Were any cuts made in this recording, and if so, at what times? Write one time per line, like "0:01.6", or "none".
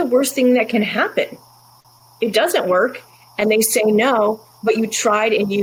none